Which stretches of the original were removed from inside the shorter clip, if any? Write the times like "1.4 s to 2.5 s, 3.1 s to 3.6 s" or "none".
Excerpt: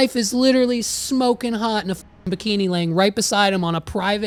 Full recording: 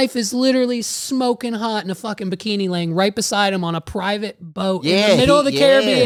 none